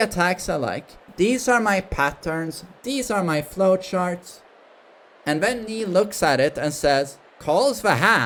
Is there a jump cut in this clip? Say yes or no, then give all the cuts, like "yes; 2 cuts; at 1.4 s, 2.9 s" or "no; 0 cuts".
no; 0 cuts